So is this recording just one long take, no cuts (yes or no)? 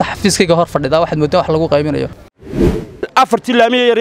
no